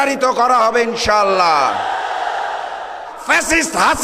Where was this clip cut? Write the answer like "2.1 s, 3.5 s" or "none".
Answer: 3.1 s